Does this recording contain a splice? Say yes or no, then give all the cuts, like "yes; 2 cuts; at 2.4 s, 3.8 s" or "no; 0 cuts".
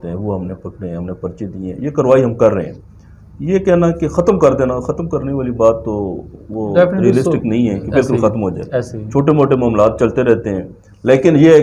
no; 0 cuts